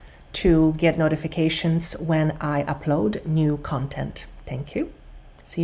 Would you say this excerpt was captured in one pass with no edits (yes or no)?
yes